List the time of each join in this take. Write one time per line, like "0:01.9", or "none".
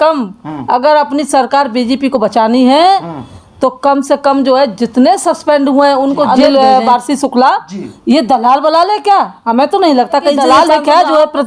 0:06.3
0:10.4